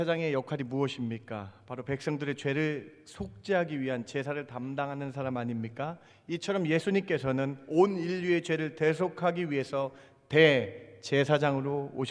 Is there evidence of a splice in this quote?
no; 0 cuts

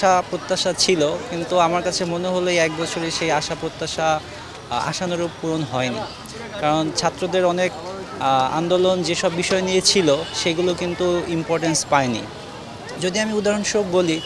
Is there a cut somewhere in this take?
no; 0 cuts

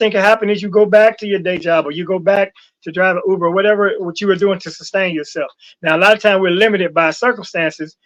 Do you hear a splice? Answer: no; 0 cuts

